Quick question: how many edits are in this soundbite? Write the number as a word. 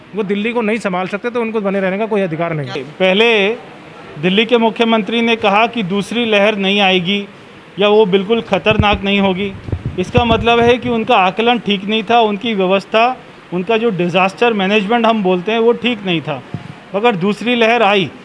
one